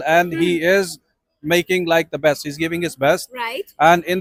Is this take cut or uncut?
uncut